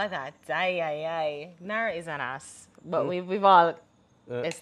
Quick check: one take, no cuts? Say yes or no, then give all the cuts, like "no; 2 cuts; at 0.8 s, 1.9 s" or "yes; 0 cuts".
yes; 0 cuts